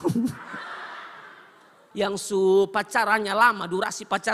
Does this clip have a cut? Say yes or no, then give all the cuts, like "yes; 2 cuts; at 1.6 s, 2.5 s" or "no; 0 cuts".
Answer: yes; 1 cut; at 1.8 s